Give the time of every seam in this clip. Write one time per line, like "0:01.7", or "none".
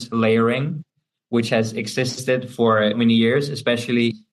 0:03.0